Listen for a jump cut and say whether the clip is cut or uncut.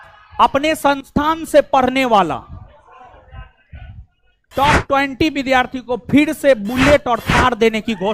uncut